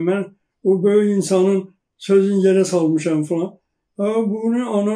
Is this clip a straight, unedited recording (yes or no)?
yes